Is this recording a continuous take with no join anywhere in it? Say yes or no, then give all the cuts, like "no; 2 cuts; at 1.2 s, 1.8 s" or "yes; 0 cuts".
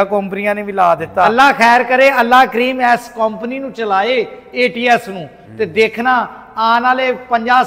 no; 1 cut; at 1.3 s